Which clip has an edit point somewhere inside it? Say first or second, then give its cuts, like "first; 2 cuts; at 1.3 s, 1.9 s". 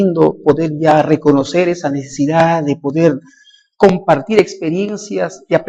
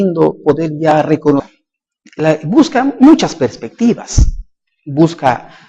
first; 1 cut; at 1.5 s